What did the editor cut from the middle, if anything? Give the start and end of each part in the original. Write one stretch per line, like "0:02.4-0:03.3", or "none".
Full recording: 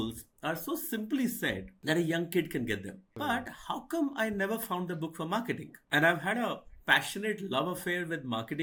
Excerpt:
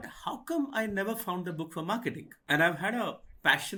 none

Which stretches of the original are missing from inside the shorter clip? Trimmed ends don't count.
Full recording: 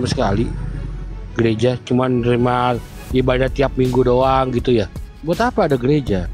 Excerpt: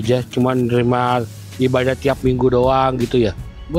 none

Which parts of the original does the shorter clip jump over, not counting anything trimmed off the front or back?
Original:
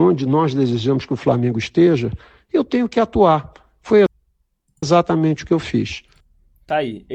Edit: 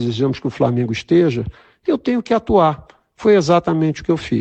0:04.1-0:04.9

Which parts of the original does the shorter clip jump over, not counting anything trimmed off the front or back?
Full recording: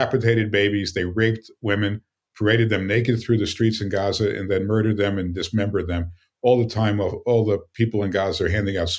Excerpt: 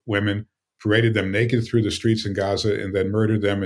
none

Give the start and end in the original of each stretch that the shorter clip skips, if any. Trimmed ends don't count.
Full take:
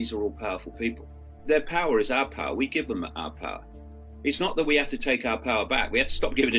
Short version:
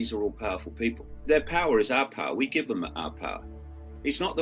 0:01.1-0:01.3

